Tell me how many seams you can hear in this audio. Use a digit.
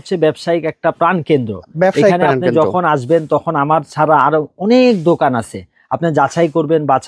0